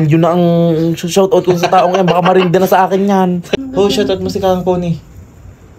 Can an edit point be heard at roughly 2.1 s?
no; 1 cut; at 3.5 s

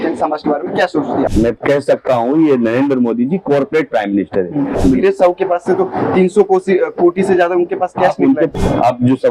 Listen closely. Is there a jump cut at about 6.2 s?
no; 3 cuts; at 1.3 s, 4.7 s, 8.4 s

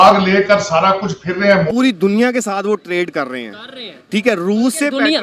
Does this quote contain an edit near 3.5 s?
no; 1 cut; at 1.7 s

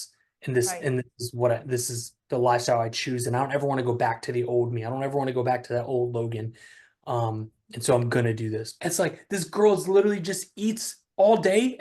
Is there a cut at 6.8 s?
no; 1 cut; at 8.7 s

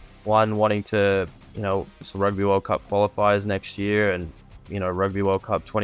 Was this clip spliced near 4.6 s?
yes; 1 cut; at 4.6 s

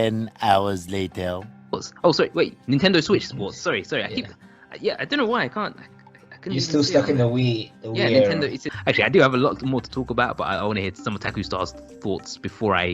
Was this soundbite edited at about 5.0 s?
no; 2 cuts; at 8.7 s, 11.3 s

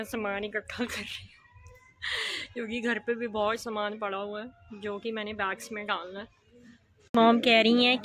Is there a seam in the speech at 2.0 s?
no; 1 cut; at 7.1 s

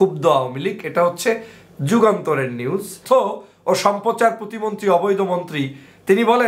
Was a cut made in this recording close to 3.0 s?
yes; 1 cut; at 3.0 s

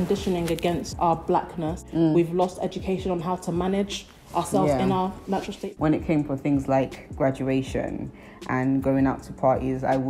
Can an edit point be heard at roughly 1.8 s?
yes; 3 cuts; at 0.9 s, 1.8 s, 5.6 s

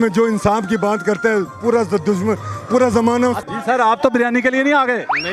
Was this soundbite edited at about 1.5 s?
no; 1 cut; at 3.4 s

